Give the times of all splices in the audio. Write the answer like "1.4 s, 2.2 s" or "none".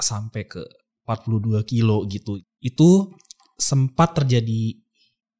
2.3 s